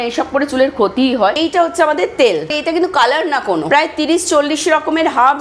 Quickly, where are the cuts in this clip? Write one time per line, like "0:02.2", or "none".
0:01.4
0:02.6
0:03.6